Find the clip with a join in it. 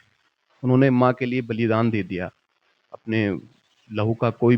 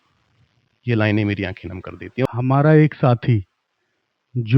second; 1 cut; at 2.2 s

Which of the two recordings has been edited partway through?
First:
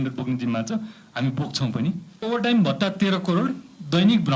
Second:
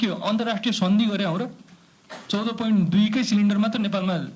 first; 1 cut; at 2.2 s

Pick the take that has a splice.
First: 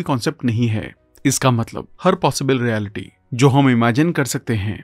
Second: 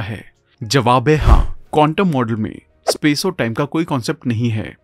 second; 1 cut; at 1.7 s

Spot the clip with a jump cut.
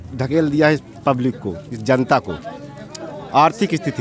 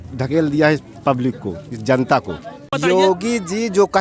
second; 1 cut; at 2.7 s

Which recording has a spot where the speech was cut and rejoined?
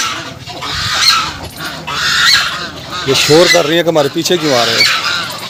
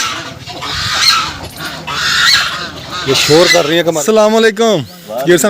second; 1 cut; at 4.0 s

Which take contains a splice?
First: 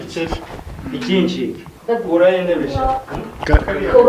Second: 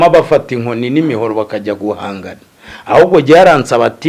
first; 1 cut; at 1.7 s

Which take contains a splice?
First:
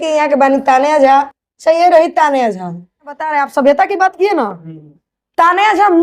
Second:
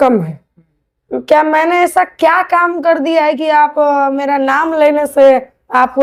first; 1 cut; at 3.3 s

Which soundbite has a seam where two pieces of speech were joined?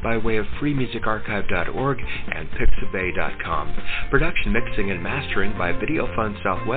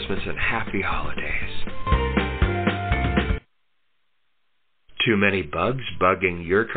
second; 1 cut; at 4.4 s

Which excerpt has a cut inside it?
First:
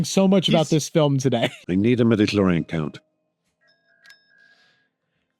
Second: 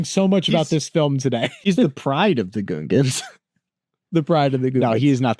first; 1 cut; at 1.6 s

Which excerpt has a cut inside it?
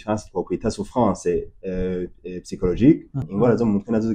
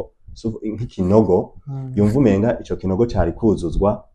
first; 1 cut; at 3.2 s

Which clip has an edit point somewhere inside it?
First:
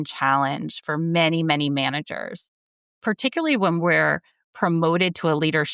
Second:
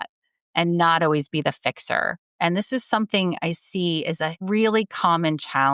second; 1 cut; at 4.4 s

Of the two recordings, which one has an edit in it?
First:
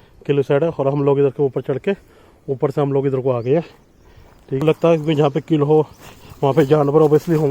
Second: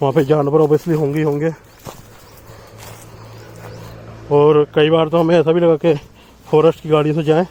first; 1 cut; at 4.6 s

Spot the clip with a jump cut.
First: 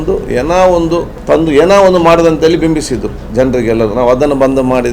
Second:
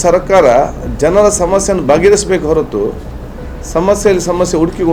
first; 1 cut; at 1.1 s

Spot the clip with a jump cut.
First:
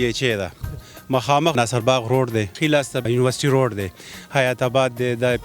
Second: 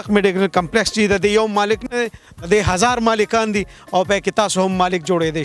first; 2 cuts; at 1.5 s, 2.7 s

